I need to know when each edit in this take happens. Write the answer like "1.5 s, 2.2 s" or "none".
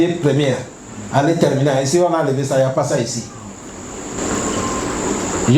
4.2 s